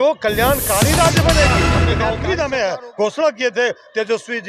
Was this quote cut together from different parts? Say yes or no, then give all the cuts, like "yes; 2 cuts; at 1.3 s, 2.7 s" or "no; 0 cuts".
yes; 1 cut; at 1.7 s